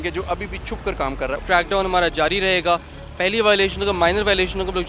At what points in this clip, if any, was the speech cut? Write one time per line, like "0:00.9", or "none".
0:01.4